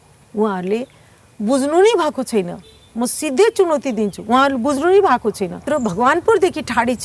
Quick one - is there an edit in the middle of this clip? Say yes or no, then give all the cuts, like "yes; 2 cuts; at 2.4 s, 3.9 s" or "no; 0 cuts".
yes; 1 cut; at 5.6 s